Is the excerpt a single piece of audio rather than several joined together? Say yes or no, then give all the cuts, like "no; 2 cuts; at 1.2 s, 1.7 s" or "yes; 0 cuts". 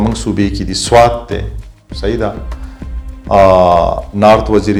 yes; 0 cuts